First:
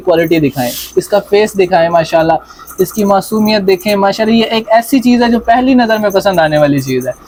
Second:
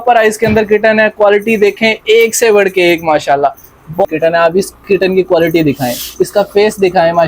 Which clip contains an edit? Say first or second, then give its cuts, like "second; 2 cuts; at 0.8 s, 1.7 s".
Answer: second; 1 cut; at 4.1 s